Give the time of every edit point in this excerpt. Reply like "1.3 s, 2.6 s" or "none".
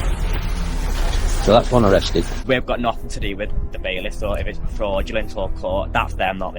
2.5 s